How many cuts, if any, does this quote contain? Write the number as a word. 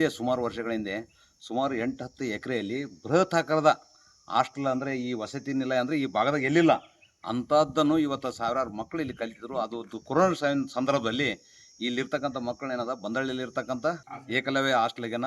one